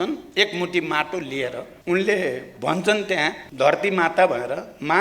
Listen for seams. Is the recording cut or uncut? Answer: cut